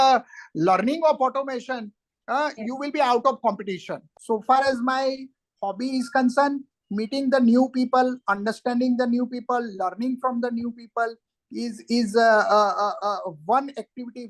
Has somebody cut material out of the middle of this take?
yes; 1 cut; at 4.0 s

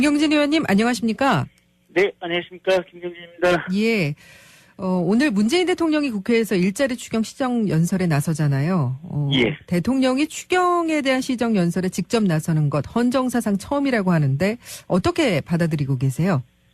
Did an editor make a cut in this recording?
yes; 1 cut; at 1.6 s

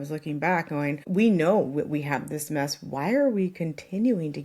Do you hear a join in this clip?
yes; 1 cut; at 1.0 s

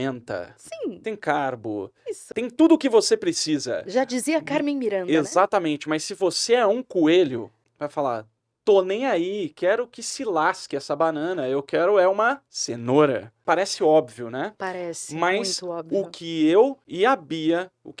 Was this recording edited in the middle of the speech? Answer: yes; 1 cut; at 2.3 s

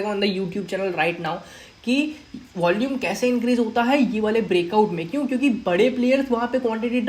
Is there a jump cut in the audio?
no; 0 cuts

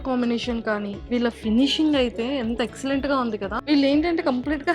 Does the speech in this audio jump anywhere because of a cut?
yes; 2 cuts; at 1.1 s, 3.6 s

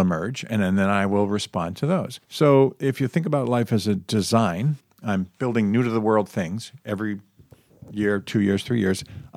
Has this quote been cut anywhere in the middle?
no; 0 cuts

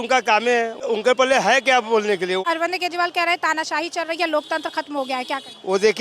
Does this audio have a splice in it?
yes; 2 cuts; at 0.9 s, 2.4 s

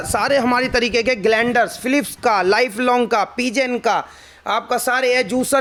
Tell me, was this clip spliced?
no; 0 cuts

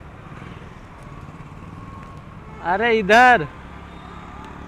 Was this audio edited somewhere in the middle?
no; 0 cuts

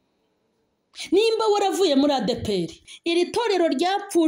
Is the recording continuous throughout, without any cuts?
no; 1 cut; at 2.7 s

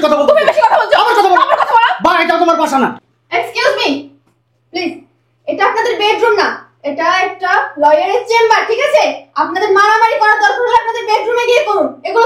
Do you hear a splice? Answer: no; 0 cuts

